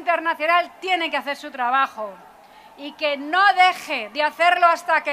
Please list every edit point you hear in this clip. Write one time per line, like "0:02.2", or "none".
none